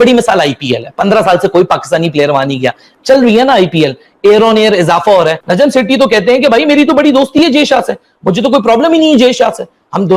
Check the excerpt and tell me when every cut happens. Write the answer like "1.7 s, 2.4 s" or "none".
5.4 s